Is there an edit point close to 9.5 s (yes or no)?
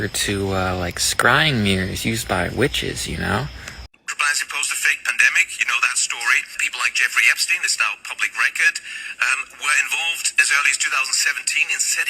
no